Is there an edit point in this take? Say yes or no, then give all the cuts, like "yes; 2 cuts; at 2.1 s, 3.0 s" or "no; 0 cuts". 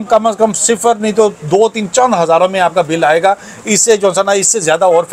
no; 0 cuts